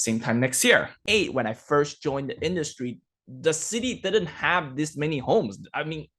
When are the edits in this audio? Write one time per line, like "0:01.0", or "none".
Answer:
0:00.9